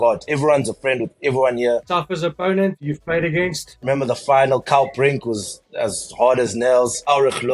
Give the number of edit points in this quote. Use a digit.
2